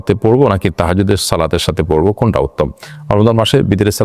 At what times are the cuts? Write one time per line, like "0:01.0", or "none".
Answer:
none

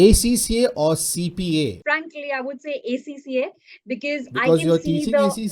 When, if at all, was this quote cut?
0:01.8

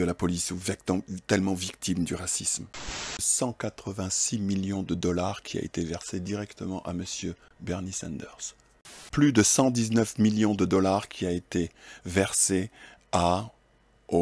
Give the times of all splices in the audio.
0:03.2
0:09.0

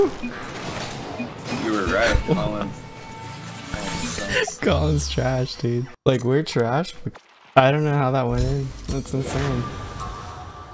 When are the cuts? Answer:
0:05.9
0:07.0

